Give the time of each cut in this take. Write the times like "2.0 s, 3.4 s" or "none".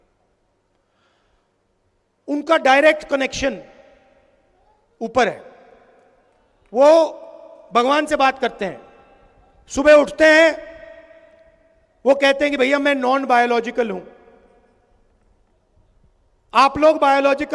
none